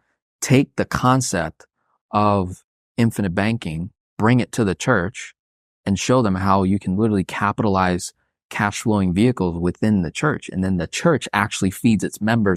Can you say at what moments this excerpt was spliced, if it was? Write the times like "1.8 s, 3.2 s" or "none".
none